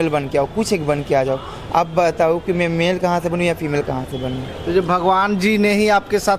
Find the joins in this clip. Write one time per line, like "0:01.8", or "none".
none